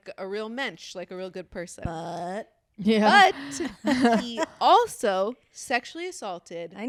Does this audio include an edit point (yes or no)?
no